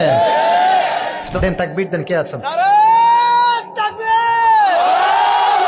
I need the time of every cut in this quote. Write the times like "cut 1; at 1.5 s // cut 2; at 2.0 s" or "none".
cut 1; at 1.3 s